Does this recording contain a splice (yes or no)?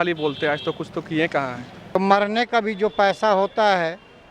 yes